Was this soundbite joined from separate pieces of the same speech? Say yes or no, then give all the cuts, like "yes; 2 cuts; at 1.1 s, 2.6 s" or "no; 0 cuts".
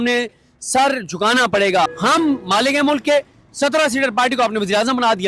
yes; 1 cut; at 1.9 s